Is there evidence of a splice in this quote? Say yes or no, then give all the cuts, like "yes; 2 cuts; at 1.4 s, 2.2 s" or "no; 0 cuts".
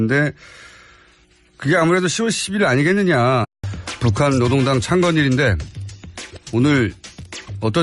no; 0 cuts